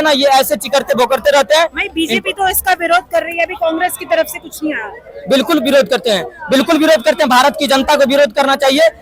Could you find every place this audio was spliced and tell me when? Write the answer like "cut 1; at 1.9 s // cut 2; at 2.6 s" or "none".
none